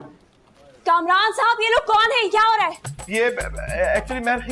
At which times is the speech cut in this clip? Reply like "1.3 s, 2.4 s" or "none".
2.9 s